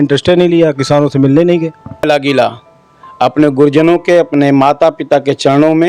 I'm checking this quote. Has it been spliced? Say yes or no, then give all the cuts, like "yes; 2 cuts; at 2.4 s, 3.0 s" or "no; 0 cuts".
yes; 1 cut; at 2.0 s